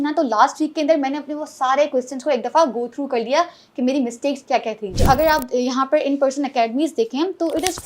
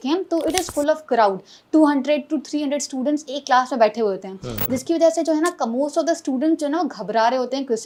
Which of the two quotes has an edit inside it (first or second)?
first